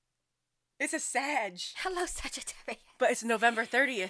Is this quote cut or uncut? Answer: uncut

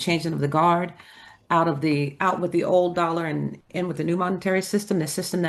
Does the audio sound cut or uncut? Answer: uncut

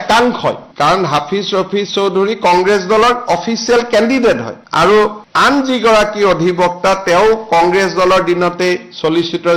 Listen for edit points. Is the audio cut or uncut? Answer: uncut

